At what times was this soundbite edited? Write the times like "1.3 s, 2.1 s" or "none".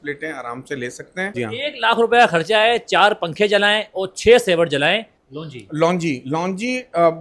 1.3 s, 5.1 s